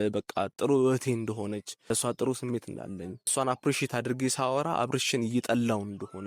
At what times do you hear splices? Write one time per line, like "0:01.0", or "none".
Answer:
0:01.7
0:03.3